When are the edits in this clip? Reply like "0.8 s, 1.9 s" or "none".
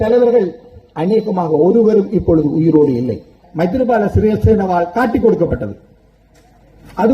3.4 s